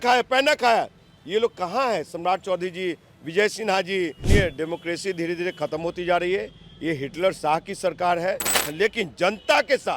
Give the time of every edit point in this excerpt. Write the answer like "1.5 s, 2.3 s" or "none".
4.2 s, 8.6 s